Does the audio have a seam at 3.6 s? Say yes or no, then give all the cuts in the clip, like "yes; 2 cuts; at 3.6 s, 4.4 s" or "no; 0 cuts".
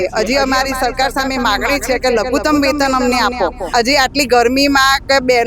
yes; 1 cut; at 3.6 s